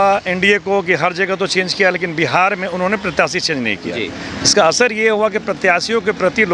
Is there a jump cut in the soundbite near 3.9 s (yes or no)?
no